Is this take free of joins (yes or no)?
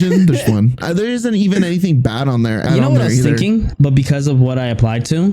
no